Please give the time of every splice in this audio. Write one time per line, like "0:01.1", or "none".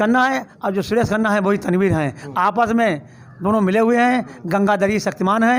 none